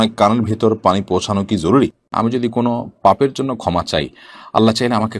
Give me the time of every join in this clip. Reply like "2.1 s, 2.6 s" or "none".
2.0 s